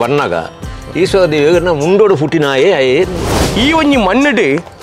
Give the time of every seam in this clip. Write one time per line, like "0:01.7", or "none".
0:03.4